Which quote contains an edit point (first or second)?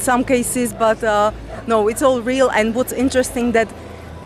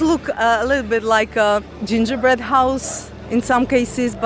second